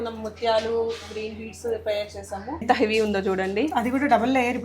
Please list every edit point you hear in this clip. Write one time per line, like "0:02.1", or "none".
0:02.6